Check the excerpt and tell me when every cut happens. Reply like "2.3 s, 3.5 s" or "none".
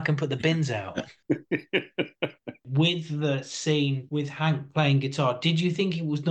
1.1 s, 2.6 s, 4.0 s